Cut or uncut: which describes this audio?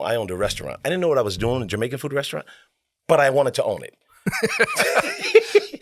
uncut